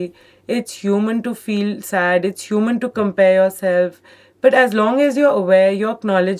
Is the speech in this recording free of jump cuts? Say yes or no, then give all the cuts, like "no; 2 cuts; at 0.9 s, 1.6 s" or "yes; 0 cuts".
yes; 0 cuts